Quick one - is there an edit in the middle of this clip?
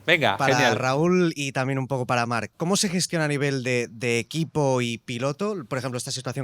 yes; 1 cut; at 2.5 s

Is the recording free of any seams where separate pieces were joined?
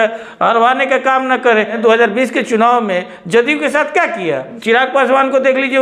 no; 2 cuts; at 1.8 s, 4.5 s

